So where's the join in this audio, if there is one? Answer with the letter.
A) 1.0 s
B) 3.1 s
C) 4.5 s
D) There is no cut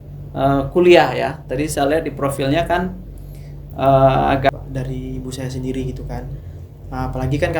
C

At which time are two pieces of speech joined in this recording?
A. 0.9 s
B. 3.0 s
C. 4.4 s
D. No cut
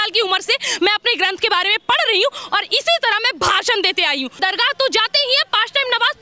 C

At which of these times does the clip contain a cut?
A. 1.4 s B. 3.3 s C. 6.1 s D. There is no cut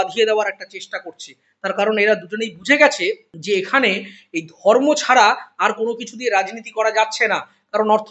B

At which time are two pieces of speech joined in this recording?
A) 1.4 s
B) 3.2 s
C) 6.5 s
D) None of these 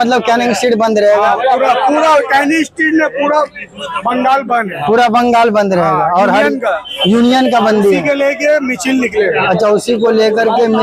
D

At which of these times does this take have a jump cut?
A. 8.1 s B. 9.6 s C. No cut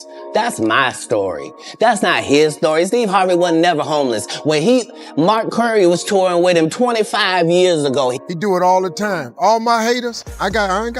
A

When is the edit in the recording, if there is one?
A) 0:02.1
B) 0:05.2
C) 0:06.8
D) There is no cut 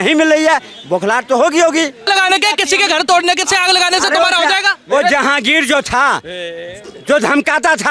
A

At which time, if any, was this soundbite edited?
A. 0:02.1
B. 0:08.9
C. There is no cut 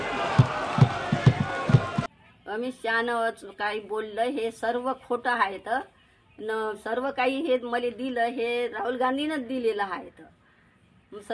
A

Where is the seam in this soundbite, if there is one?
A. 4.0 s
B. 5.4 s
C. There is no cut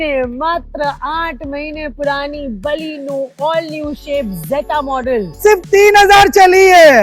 B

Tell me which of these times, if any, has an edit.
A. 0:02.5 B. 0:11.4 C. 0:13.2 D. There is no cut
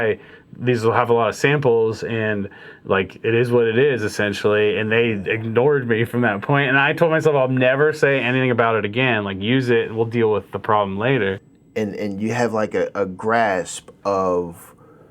B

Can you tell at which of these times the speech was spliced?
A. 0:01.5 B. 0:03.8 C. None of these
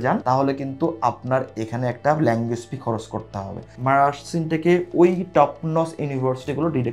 B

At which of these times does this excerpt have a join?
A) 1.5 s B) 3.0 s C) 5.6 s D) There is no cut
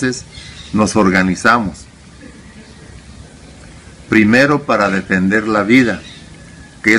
D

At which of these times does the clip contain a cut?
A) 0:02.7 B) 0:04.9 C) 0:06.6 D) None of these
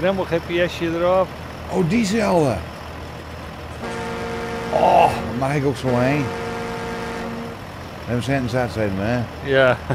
D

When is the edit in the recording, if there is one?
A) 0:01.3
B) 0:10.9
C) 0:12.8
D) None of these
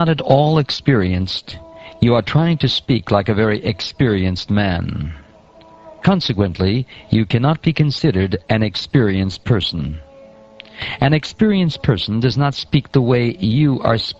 D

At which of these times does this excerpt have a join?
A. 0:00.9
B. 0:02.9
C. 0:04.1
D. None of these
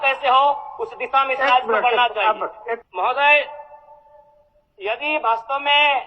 B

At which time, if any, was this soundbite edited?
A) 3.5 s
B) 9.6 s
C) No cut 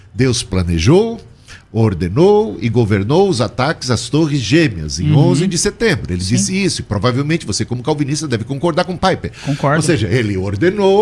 C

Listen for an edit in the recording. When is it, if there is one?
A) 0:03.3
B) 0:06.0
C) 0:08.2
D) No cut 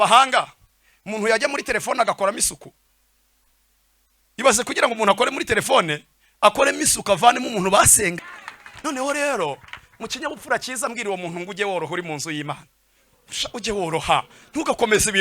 C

